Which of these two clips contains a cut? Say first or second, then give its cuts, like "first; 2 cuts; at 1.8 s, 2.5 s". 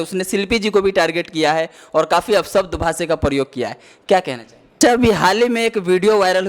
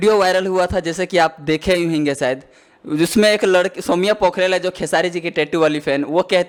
first; 1 cut; at 4.8 s